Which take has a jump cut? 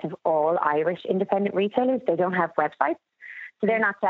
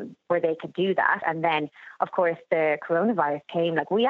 second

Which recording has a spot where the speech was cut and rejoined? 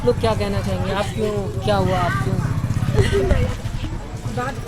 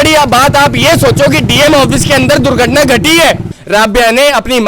second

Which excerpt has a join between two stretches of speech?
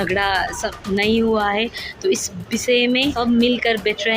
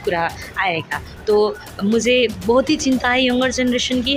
first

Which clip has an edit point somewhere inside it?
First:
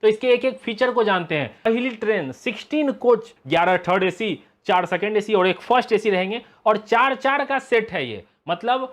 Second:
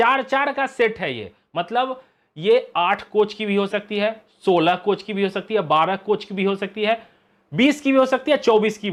first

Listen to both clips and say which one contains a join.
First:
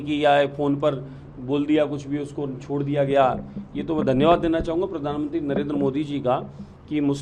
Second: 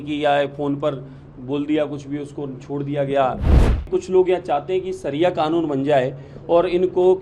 second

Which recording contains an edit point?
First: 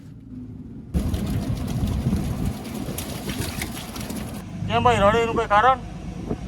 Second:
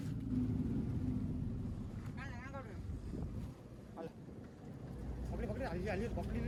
first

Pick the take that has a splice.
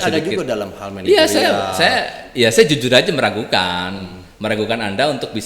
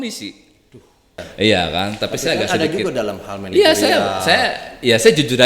second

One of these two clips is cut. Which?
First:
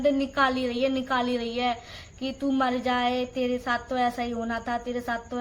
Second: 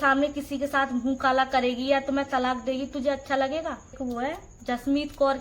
second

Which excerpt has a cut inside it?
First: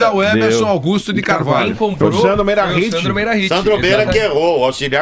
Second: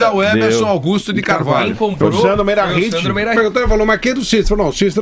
first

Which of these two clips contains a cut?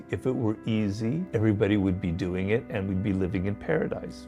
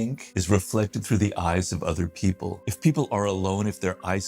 second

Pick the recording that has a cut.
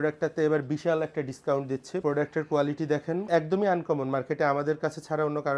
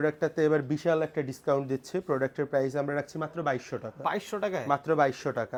first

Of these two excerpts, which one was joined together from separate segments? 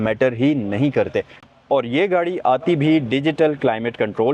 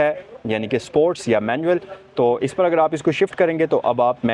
first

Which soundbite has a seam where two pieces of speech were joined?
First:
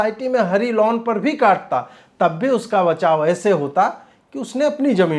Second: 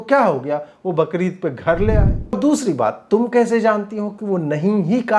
second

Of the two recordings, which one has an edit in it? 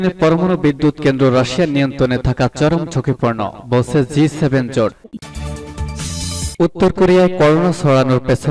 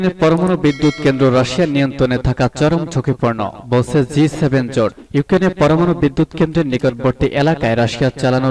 first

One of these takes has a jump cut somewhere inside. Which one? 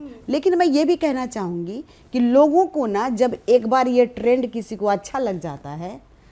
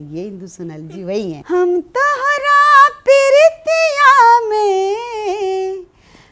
second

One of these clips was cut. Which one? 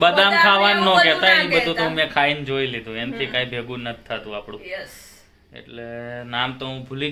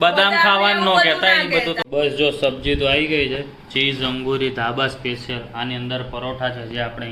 second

